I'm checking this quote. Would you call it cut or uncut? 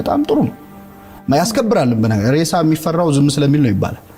uncut